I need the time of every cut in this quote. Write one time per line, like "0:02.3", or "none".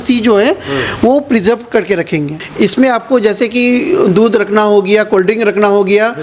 0:02.4